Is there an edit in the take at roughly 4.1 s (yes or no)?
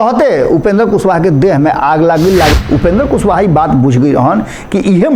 no